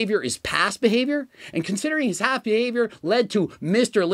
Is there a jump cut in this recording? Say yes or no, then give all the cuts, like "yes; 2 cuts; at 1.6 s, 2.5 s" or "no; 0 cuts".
no; 0 cuts